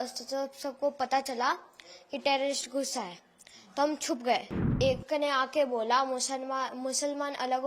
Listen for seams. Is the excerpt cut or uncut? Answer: cut